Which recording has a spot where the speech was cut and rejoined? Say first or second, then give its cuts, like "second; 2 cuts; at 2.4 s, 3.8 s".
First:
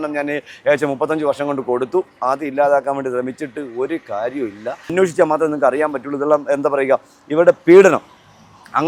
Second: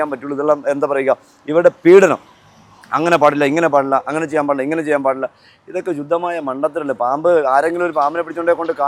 first; 1 cut; at 4.9 s